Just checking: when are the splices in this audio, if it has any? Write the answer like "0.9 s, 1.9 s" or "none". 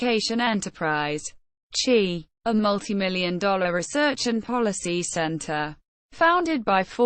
2.3 s